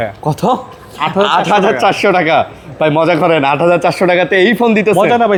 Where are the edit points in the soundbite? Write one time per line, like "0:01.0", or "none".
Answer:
none